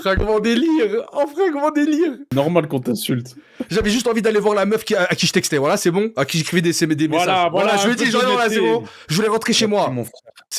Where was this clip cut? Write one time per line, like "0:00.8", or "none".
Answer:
none